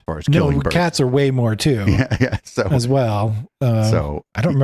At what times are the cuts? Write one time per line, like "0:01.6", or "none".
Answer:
none